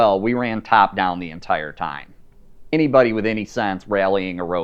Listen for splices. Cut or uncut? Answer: cut